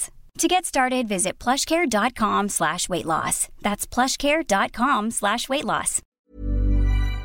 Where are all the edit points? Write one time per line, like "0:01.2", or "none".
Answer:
0:06.0

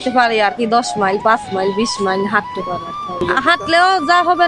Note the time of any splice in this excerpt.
0:02.8

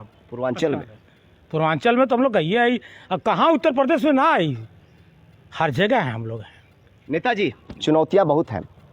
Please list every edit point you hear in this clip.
none

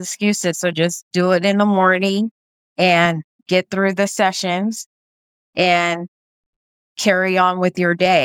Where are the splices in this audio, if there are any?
none

